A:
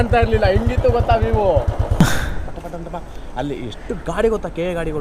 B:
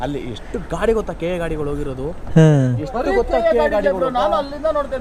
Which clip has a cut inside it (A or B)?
A